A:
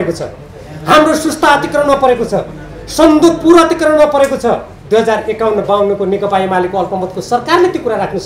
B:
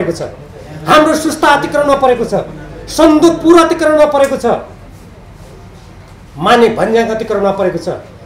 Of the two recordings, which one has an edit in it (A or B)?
A